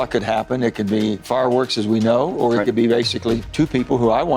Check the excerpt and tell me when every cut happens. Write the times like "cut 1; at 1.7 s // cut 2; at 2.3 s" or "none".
cut 1; at 1.2 s // cut 2; at 3.5 s